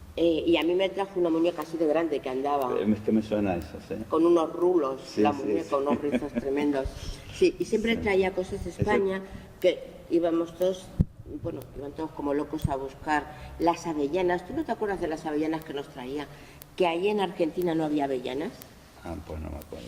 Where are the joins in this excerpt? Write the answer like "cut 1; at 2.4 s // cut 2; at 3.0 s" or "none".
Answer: cut 1; at 15.8 s

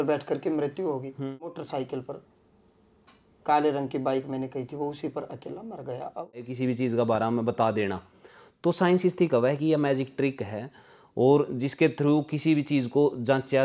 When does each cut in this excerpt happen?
cut 1; at 1.6 s // cut 2; at 6.5 s

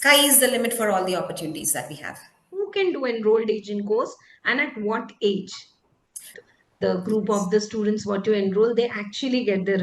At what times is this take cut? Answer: cut 1; at 2.7 s // cut 2; at 6.4 s

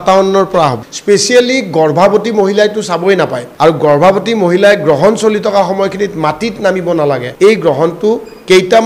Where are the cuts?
cut 1; at 0.9 s // cut 2; at 3.4 s // cut 3; at 7.3 s

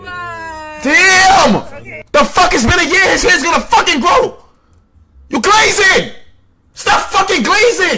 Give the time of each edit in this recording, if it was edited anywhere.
none

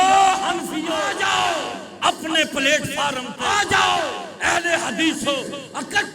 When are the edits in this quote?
cut 1; at 1.1 s // cut 2; at 3.3 s

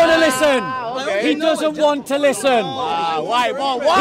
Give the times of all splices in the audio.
none

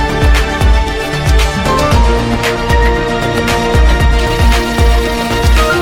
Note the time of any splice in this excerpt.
none

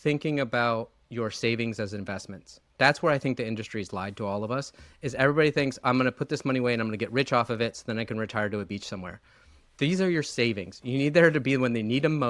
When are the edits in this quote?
none

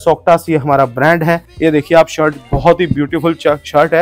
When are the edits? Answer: cut 1; at 1.5 s

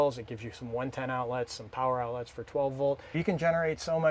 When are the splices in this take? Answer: cut 1; at 3.1 s

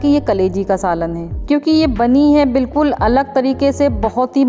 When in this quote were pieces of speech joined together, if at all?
cut 1; at 1.3 s

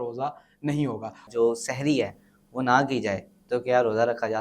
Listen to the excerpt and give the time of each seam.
cut 1; at 1.3 s

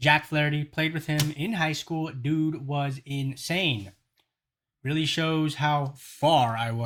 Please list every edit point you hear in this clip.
none

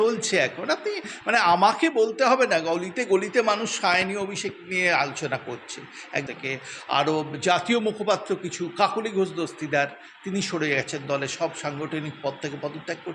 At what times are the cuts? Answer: cut 1; at 6.3 s

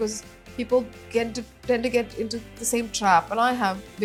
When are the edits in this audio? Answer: none

